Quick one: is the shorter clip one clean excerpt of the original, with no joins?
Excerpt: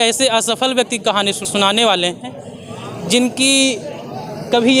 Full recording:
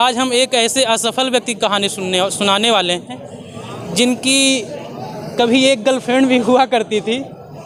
no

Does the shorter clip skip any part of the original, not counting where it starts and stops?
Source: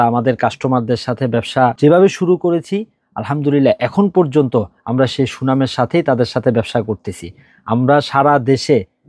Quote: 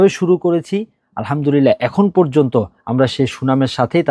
no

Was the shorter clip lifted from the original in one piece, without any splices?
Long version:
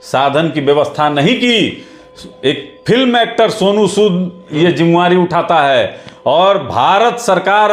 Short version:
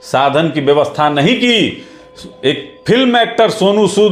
yes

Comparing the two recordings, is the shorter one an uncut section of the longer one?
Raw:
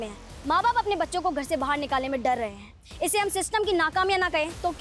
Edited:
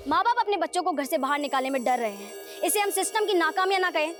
yes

